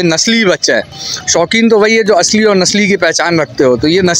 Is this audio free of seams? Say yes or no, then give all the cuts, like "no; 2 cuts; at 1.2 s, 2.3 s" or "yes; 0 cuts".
yes; 0 cuts